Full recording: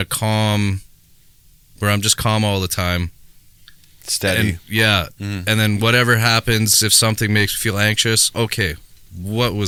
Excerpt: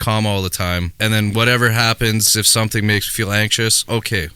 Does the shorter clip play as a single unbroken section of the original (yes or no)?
no